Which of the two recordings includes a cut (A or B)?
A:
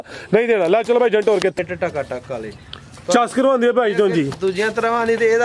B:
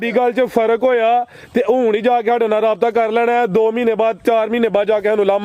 A